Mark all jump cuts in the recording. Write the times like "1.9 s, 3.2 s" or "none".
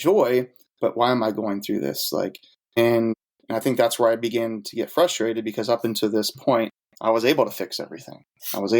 2.8 s, 3.3 s, 6.8 s